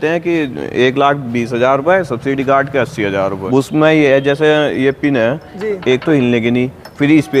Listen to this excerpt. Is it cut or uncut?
cut